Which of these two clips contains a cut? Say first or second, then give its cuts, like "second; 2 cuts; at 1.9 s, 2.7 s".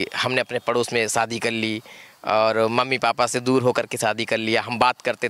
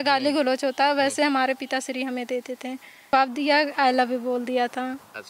second; 1 cut; at 3.1 s